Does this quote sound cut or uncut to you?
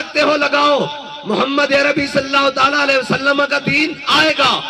uncut